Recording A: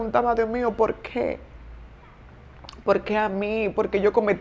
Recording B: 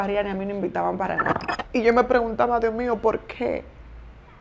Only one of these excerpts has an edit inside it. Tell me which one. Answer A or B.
B